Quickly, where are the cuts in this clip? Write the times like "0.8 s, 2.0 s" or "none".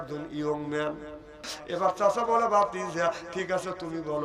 1.5 s